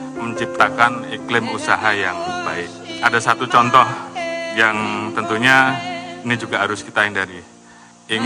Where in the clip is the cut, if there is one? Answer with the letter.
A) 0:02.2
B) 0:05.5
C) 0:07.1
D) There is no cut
D